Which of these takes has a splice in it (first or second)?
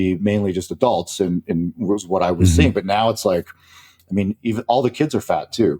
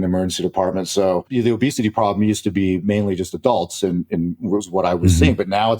second